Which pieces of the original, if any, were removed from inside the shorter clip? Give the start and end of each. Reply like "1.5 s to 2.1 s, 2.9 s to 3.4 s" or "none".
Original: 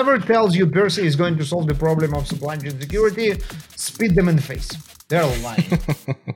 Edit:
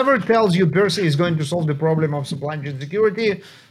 none